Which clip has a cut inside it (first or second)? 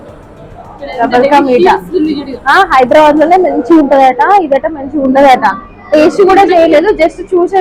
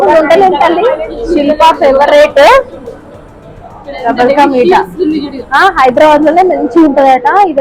second